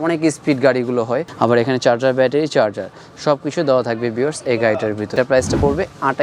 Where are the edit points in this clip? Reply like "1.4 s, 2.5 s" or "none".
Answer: 1.3 s, 5.1 s